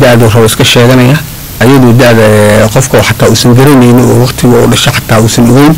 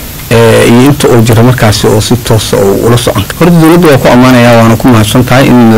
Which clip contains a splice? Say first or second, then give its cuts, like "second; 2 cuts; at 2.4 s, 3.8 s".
second; 1 cut; at 3.3 s